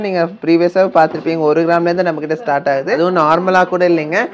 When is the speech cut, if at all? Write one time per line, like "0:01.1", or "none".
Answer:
0:03.0